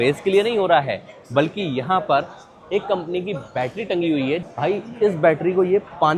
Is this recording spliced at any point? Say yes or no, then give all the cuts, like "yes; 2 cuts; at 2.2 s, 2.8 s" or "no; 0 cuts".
yes; 1 cut; at 4.4 s